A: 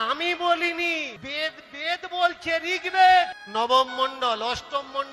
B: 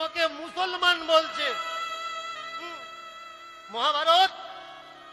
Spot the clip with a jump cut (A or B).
A